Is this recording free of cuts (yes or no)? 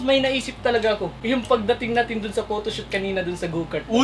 no